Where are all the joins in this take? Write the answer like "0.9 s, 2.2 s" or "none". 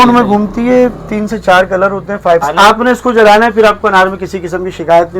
2.5 s